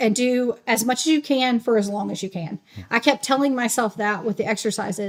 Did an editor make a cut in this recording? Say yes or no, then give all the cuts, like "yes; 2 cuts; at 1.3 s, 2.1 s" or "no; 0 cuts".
no; 0 cuts